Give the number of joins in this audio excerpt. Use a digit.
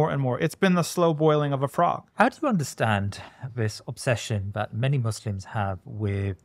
1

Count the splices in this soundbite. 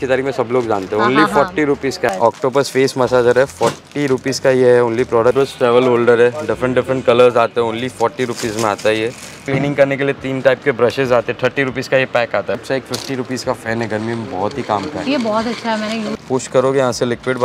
5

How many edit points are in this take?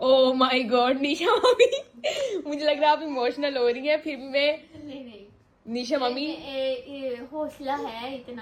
0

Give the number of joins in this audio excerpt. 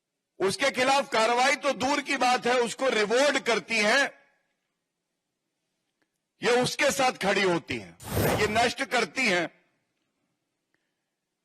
1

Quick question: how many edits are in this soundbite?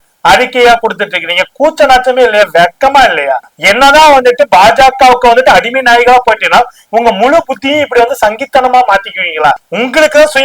2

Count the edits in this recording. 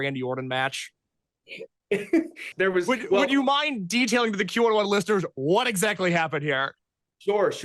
1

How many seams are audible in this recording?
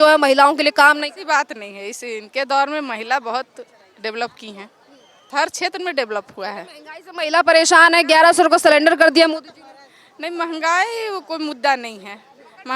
1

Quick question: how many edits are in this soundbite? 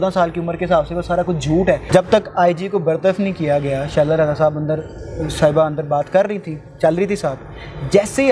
1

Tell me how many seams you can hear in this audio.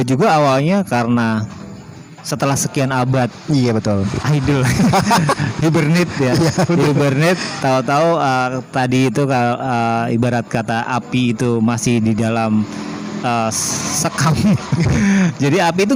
0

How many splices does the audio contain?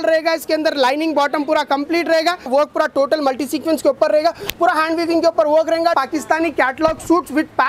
2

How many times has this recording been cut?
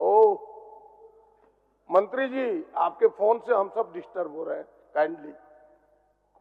0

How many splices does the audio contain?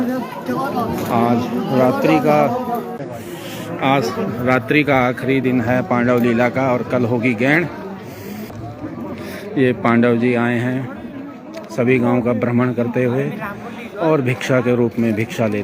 2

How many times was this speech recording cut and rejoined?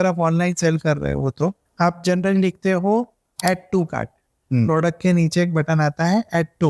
2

